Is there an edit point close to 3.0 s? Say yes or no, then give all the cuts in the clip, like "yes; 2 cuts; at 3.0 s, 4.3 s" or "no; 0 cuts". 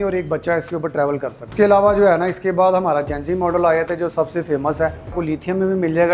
no; 2 cuts; at 1.4 s, 5.2 s